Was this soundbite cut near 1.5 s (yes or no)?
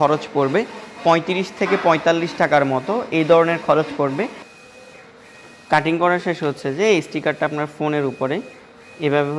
no